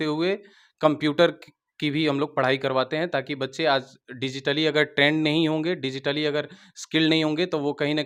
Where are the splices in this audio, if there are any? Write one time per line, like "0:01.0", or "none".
none